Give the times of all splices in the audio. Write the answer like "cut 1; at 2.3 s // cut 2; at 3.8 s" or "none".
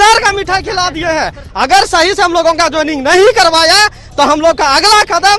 cut 1; at 1.4 s